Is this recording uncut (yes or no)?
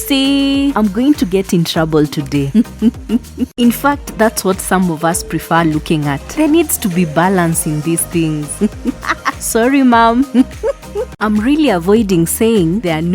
no